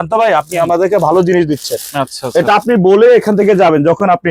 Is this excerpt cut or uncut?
uncut